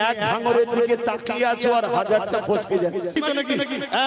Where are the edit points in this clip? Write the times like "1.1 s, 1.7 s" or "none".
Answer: 3.2 s